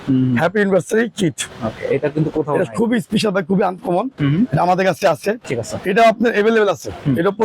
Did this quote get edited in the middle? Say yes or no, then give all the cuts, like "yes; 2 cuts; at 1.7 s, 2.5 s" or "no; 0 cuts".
yes; 1 cut; at 5.4 s